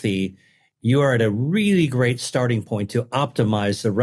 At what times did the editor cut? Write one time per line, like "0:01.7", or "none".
none